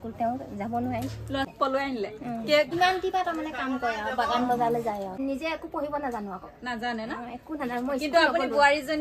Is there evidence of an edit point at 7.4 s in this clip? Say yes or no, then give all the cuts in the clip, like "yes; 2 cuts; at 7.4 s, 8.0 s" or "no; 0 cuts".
no; 3 cuts; at 1.5 s, 2.7 s, 5.2 s